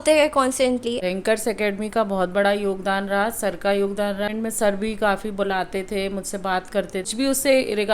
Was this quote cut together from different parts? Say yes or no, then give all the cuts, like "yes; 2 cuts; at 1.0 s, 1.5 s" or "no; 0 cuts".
yes; 3 cuts; at 1.0 s, 4.3 s, 7.1 s